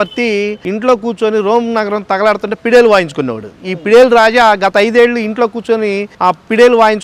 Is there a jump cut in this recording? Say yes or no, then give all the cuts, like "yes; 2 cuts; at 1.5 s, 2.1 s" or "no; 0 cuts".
no; 0 cuts